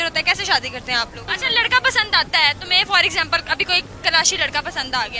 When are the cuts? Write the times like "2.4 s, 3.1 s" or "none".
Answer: 1.2 s